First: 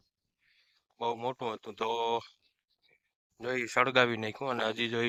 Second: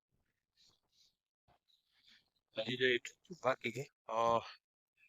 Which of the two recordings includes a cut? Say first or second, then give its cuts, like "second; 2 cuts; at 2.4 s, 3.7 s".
second; 1 cut; at 3.9 s